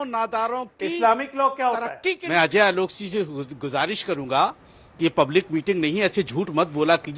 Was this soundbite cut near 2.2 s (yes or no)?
yes